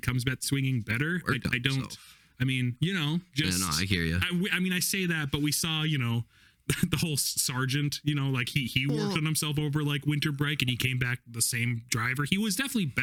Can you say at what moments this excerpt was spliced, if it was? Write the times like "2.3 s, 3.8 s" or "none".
none